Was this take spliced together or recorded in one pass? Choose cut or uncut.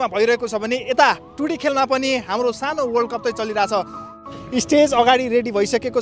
cut